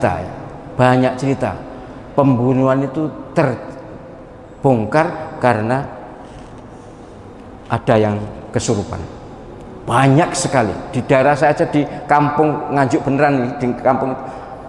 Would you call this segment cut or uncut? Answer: uncut